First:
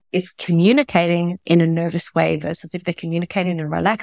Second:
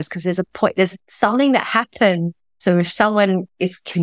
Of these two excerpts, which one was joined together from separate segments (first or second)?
second